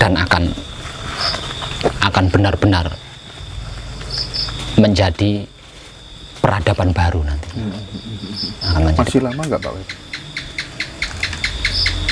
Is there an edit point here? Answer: no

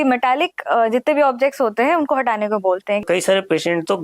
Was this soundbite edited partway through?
yes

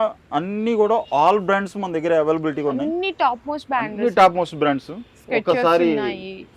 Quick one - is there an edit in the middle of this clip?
no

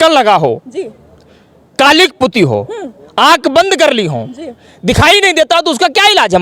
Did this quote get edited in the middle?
no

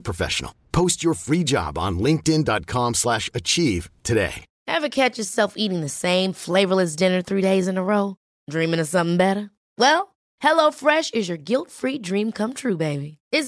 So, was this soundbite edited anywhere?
yes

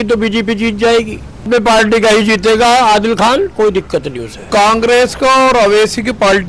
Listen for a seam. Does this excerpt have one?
yes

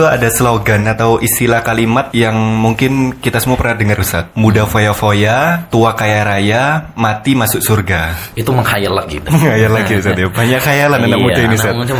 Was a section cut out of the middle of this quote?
yes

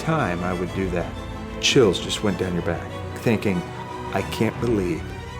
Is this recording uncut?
no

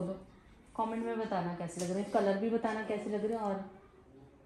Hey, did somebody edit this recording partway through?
no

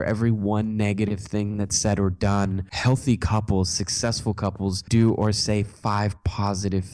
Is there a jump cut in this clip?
yes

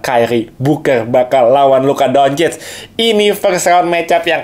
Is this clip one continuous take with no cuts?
yes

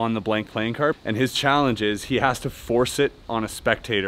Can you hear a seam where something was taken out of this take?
yes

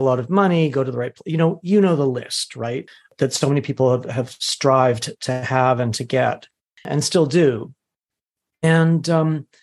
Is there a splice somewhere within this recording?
yes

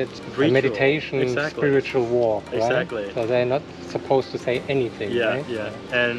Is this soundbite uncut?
yes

